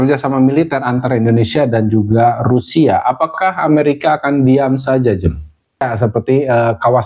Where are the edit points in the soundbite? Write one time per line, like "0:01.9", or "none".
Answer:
0:05.8